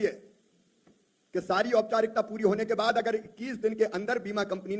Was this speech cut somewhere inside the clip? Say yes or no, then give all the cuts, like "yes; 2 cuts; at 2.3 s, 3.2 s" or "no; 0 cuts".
no; 0 cuts